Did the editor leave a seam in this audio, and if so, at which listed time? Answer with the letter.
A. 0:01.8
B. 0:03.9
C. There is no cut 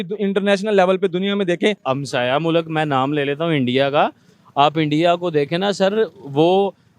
A